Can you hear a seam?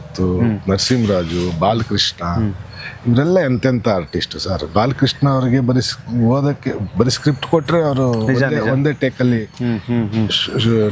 no; 0 cuts

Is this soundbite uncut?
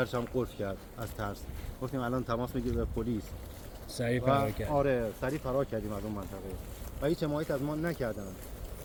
yes; 0 cuts

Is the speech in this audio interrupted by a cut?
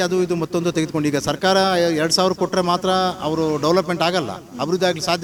no; 0 cuts

